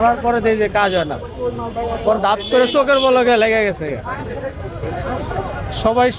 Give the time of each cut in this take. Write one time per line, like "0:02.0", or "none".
none